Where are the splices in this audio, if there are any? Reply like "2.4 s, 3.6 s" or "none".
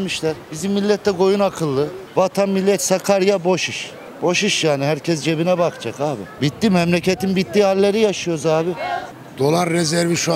2.0 s, 6.3 s, 9.0 s